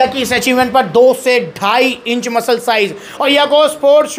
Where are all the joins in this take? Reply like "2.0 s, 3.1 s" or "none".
3.2 s